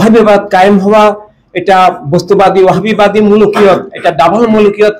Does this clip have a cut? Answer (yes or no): no